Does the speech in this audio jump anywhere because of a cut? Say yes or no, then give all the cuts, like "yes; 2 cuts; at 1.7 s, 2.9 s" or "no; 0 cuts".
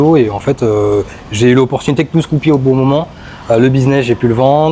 no; 0 cuts